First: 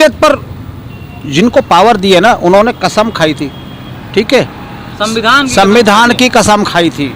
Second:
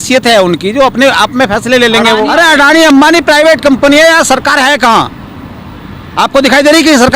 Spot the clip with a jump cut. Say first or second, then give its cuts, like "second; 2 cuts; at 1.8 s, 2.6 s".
second; 1 cut; at 2.3 s